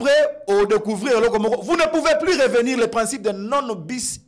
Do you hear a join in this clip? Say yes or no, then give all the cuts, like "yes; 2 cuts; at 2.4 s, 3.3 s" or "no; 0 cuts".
no; 0 cuts